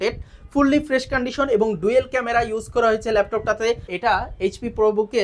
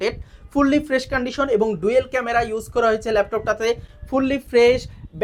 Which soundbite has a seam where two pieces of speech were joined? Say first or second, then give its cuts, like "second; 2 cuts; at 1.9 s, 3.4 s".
first; 1 cut; at 3.9 s